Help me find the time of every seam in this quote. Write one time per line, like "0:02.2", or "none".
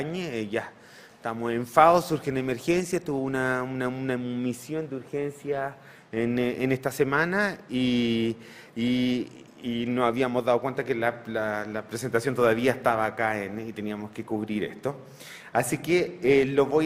none

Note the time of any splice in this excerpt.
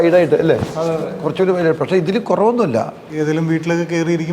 0:03.0

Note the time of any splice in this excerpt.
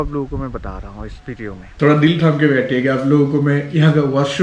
0:01.6

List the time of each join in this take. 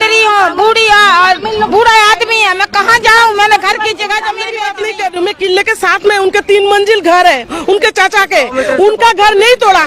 0:04.5

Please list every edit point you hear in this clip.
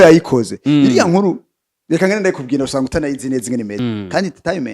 0:03.8

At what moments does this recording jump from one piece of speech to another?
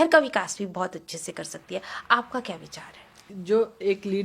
0:03.3

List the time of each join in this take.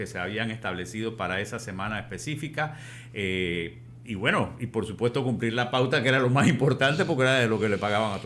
none

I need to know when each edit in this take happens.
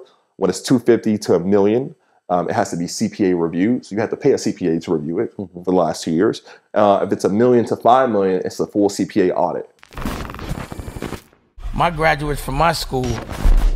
0:09.8

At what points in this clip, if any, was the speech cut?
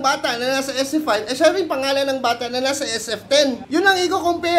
0:03.6

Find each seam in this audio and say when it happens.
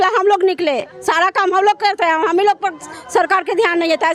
none

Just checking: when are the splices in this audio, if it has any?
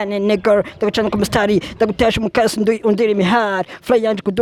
none

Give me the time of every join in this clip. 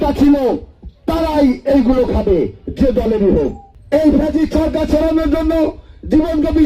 0:03.7

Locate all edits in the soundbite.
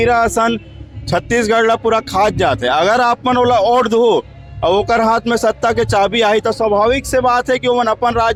none

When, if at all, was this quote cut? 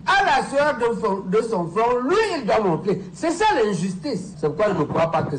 none

